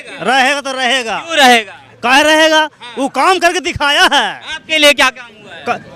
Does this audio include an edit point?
no; 0 cuts

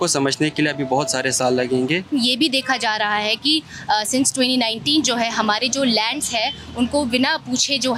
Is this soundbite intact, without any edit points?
no; 1 cut; at 2.1 s

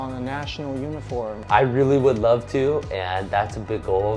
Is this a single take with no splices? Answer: no; 1 cut; at 1.4 s

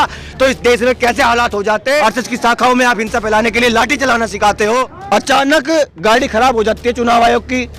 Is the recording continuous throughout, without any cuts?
no; 2 cuts; at 2.0 s, 5.0 s

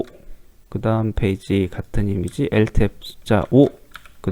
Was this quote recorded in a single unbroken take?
yes; 0 cuts

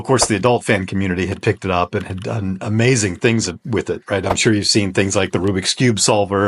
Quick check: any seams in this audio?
no; 0 cuts

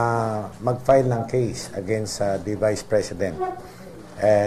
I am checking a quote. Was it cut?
no; 0 cuts

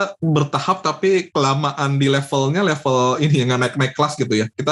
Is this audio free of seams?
yes; 0 cuts

